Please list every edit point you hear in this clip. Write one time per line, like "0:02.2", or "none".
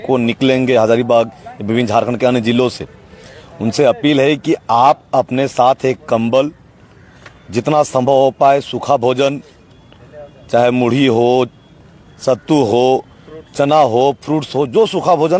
none